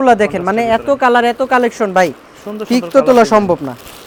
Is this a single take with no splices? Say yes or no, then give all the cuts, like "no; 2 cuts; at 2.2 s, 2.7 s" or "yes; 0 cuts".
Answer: yes; 0 cuts